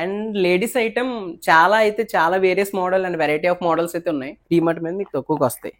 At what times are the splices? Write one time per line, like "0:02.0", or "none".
0:04.3